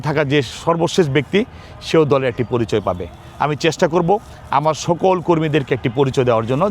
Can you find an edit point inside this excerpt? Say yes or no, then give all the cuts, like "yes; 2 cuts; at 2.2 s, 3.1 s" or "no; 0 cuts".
no; 0 cuts